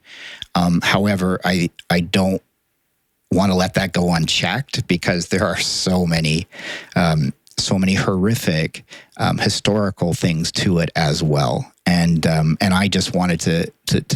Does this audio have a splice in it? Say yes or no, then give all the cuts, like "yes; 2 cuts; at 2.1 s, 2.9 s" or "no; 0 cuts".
no; 0 cuts